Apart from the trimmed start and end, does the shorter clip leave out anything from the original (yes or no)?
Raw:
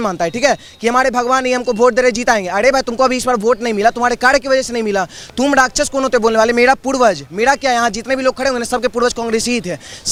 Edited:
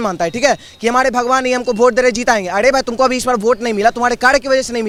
no